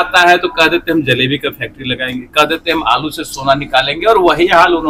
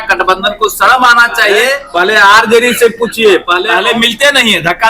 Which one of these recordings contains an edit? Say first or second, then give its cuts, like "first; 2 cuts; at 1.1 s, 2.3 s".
second; 2 cuts; at 1.8 s, 3.6 s